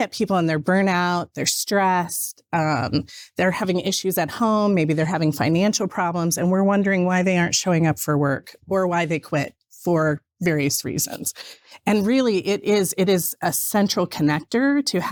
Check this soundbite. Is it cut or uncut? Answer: uncut